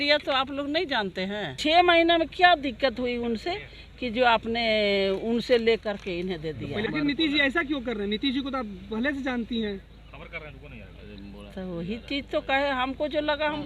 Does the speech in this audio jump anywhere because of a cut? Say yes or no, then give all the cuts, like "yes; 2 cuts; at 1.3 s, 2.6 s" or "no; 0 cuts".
yes; 2 cuts; at 1.6 s, 6.8 s